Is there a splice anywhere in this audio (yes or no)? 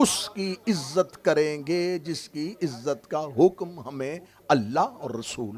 no